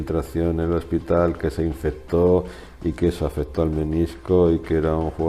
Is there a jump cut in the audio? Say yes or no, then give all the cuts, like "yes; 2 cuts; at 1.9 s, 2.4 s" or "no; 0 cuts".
no; 0 cuts